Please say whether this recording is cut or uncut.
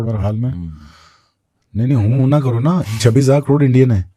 uncut